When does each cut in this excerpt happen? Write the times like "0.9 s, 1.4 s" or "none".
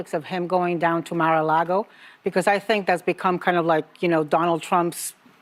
none